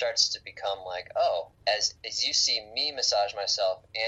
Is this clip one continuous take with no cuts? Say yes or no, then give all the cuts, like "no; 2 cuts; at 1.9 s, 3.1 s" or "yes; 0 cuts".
no; 1 cut; at 1.6 s